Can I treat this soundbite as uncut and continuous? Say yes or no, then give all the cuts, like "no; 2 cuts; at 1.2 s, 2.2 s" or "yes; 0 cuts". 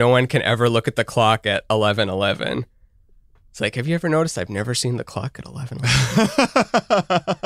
no; 1 cut; at 5.7 s